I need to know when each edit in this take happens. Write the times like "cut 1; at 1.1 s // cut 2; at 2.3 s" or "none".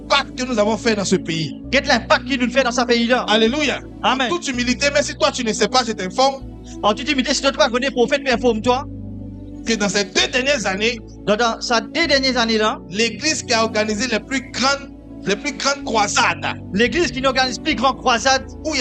cut 1; at 4.4 s